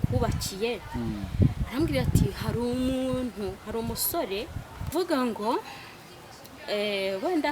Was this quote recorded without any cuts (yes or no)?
no